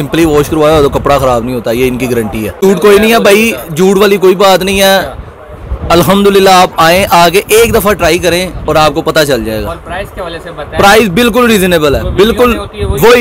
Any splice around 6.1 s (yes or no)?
no